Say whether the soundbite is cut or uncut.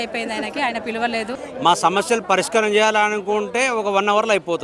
cut